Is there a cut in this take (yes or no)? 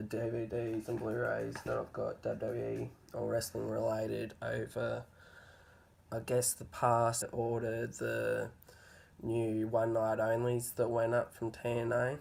no